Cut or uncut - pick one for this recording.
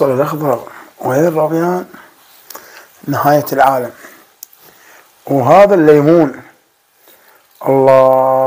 uncut